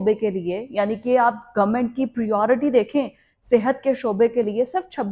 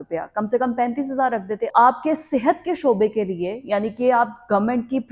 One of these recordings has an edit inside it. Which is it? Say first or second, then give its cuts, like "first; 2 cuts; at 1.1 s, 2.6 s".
second; 1 cut; at 1.7 s